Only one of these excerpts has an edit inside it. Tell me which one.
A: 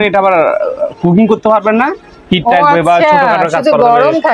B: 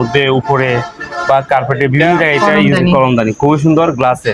B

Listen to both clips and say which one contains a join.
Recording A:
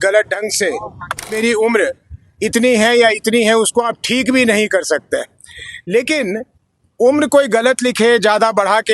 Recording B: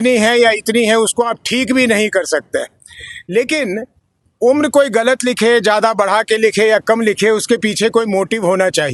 A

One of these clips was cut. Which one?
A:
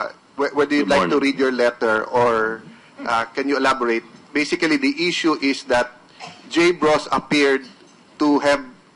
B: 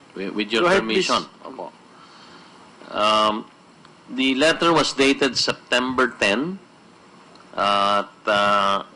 B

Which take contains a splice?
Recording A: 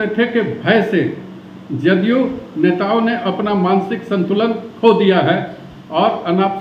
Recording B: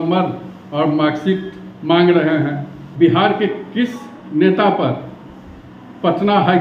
B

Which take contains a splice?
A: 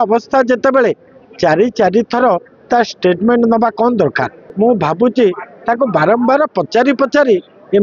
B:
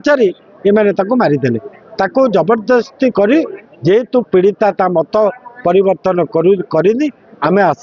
A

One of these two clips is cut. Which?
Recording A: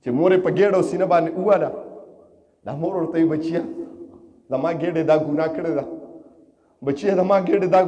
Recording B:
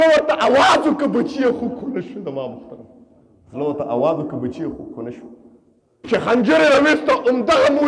B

